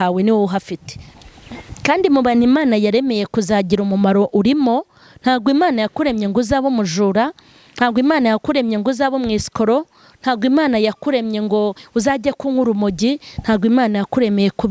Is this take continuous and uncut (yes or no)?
yes